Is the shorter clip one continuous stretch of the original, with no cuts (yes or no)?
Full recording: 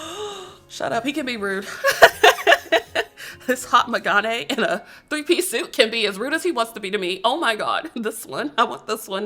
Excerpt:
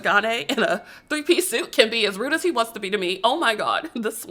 yes